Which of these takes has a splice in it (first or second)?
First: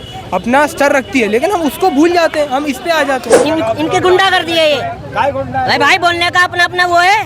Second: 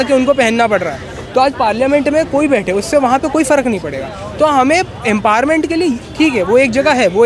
first